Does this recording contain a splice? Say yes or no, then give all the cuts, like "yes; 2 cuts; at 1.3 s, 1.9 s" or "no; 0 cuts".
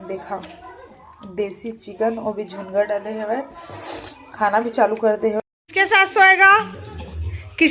yes; 1 cut; at 5.4 s